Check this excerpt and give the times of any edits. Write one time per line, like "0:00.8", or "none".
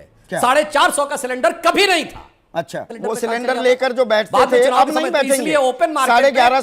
0:02.9
0:05.8